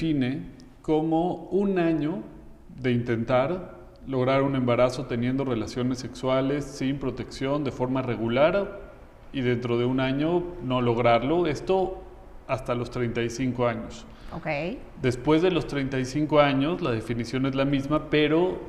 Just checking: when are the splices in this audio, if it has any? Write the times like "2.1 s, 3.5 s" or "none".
none